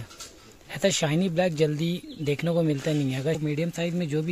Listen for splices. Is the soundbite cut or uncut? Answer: cut